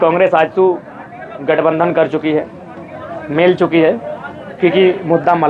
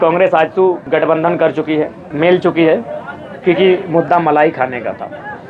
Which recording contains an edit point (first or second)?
second